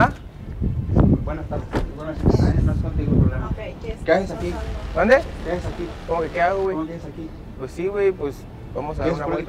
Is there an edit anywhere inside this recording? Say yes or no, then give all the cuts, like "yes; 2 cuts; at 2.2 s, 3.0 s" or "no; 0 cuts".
no; 0 cuts